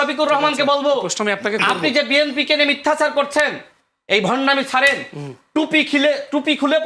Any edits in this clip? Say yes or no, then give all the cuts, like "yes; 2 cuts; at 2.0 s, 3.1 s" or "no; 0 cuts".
no; 0 cuts